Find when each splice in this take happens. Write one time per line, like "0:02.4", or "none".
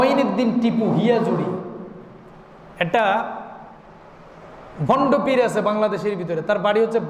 none